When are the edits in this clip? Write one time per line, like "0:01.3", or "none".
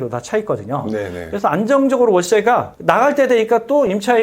0:02.7